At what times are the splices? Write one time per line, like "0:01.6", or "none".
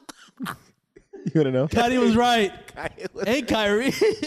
0:01.7